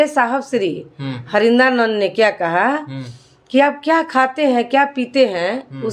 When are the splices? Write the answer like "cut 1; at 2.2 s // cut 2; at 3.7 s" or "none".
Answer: cut 1; at 3.4 s